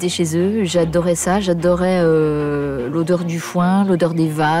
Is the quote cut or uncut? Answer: uncut